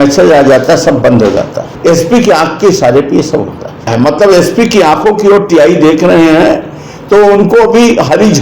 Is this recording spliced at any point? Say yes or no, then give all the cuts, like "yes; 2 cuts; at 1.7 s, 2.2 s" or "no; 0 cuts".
yes; 2 cuts; at 1.6 s, 3.9 s